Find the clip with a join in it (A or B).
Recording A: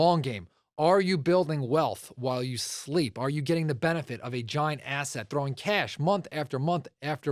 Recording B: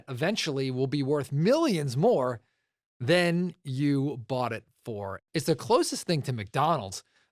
B